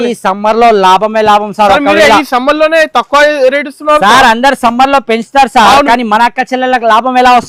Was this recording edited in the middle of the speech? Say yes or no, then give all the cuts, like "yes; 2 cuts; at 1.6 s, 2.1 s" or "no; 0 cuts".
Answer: no; 0 cuts